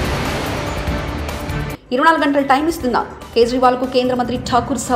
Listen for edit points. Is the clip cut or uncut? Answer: cut